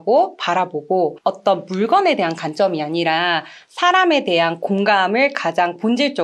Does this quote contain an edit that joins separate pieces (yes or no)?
no